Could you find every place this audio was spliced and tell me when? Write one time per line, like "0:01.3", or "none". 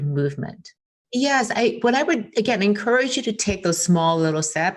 0:01.0